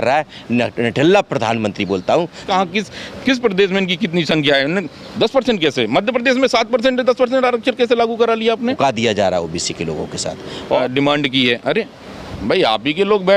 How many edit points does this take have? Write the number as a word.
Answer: three